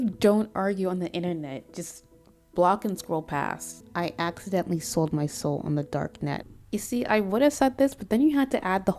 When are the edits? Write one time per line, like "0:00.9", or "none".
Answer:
0:03.8
0:06.4